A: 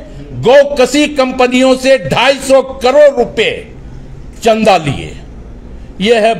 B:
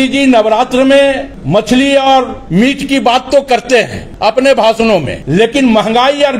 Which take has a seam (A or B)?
B